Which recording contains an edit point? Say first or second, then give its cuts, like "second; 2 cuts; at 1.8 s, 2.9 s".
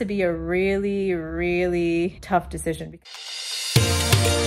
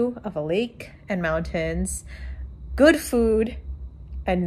first; 2 cuts; at 2.2 s, 2.9 s